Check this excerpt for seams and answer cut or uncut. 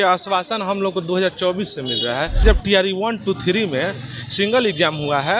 cut